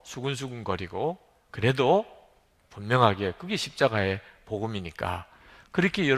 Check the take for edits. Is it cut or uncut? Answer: cut